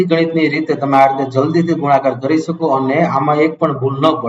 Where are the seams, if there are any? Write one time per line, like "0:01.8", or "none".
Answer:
none